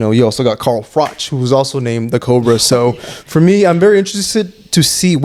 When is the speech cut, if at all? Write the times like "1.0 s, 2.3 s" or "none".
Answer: none